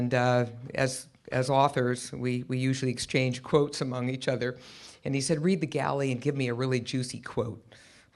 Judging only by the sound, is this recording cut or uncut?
cut